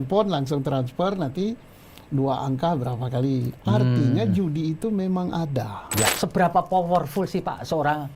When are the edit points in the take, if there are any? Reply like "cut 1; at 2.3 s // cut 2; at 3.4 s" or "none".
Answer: cut 1; at 6.1 s